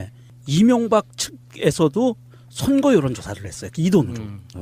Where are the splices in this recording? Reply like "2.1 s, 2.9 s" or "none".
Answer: none